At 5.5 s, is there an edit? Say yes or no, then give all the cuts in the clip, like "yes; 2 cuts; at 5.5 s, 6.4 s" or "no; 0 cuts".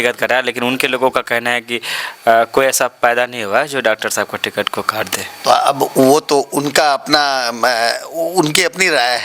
no; 0 cuts